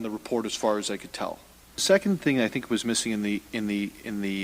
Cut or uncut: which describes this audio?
cut